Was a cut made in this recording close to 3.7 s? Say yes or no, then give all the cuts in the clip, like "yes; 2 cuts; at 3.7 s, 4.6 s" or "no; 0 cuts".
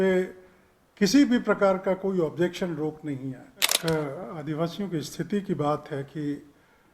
yes; 1 cut; at 3.7 s